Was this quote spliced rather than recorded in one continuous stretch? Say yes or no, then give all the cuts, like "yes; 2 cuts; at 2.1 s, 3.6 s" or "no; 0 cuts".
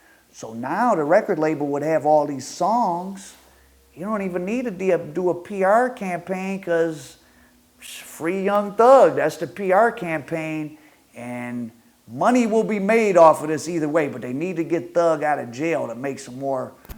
no; 0 cuts